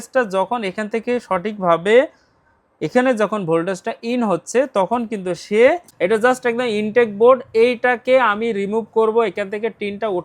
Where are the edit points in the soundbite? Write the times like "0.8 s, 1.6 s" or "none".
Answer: 5.9 s